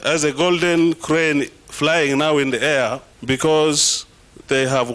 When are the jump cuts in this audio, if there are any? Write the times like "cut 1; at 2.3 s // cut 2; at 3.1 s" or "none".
cut 1; at 3.1 s